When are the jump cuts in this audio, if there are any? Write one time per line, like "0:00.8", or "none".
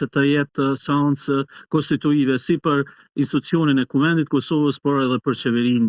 none